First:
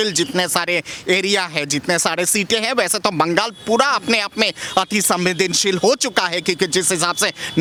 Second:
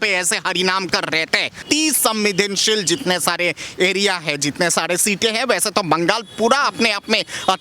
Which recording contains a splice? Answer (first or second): second